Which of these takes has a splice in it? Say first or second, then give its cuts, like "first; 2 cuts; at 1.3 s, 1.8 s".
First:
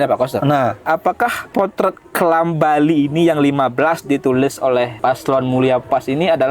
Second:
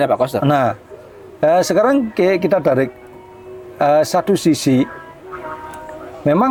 first; 2 cuts; at 1.2 s, 4.9 s